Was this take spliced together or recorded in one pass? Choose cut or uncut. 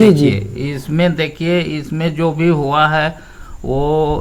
uncut